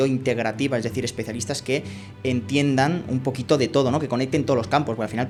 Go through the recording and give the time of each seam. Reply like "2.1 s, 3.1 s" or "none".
none